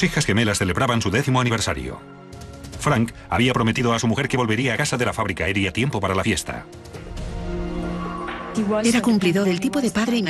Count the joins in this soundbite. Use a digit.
1